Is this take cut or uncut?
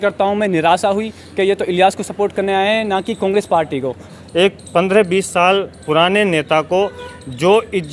cut